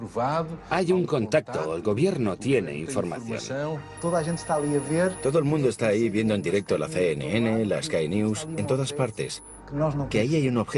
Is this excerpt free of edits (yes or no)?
yes